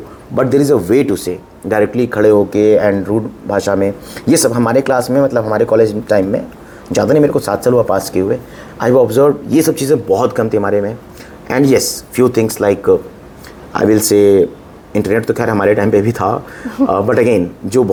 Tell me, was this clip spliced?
no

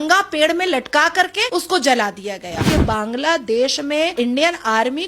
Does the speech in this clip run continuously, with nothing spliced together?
no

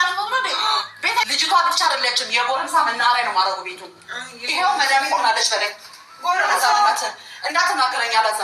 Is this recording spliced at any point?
yes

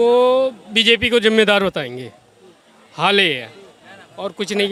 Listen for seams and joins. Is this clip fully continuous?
yes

